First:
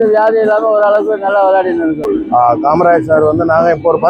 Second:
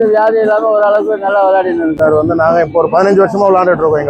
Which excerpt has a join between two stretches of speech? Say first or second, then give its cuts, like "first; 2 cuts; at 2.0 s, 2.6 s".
second; 1 cut; at 1.9 s